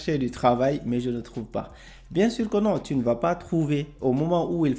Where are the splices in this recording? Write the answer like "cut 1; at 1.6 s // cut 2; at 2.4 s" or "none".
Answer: none